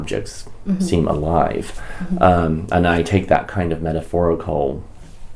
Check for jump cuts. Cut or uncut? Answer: uncut